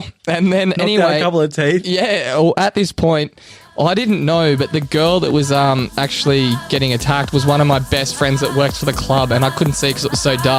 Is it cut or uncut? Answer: uncut